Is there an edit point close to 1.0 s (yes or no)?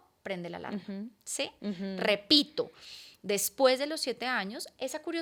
no